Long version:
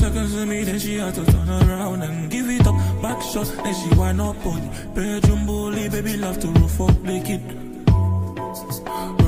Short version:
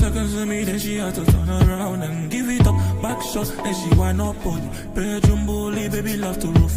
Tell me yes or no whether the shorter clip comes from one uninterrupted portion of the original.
yes